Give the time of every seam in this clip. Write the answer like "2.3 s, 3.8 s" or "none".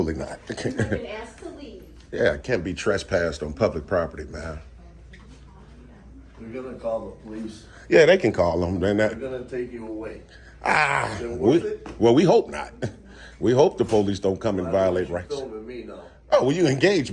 none